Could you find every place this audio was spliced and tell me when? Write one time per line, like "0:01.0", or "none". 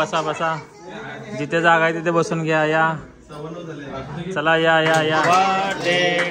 0:05.2